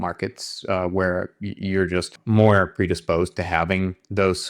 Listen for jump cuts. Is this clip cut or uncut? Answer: cut